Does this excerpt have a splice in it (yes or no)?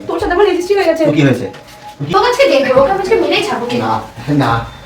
yes